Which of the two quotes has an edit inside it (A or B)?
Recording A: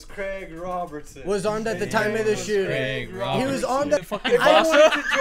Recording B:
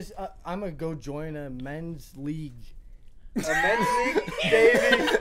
A